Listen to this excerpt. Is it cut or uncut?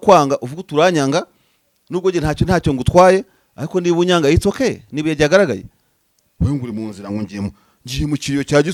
uncut